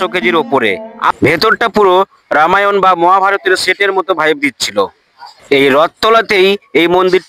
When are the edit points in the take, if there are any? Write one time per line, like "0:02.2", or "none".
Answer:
0:01.1
0:05.3